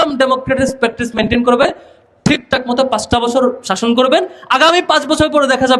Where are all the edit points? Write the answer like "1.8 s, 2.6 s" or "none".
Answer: none